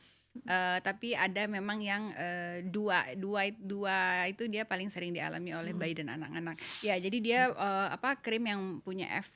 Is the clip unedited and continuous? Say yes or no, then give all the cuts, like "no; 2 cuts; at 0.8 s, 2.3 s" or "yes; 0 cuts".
no; 1 cut; at 6.7 s